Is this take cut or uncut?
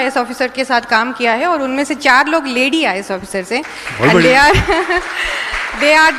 uncut